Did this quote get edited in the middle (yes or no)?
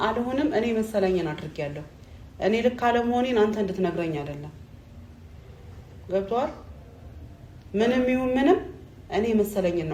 no